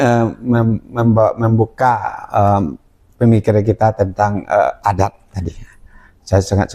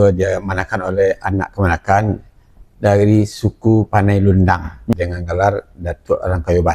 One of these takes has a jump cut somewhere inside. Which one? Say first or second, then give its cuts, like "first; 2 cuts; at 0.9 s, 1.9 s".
second; 1 cut; at 4.9 s